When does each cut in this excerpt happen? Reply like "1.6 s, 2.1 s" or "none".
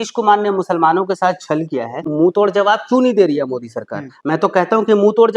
2.1 s